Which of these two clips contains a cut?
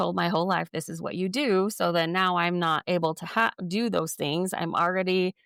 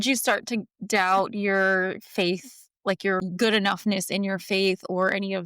second; 1 cut; at 3.2 s

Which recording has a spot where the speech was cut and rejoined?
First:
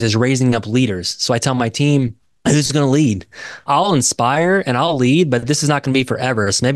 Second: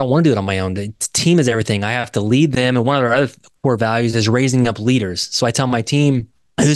first; 1 cut; at 3.6 s

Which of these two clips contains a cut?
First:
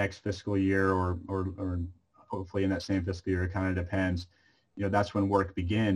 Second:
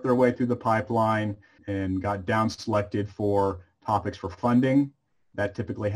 second; 1 cut; at 1.6 s

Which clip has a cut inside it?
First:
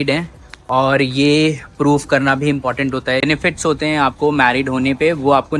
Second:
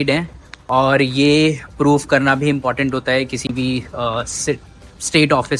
first; 1 cut; at 3.2 s

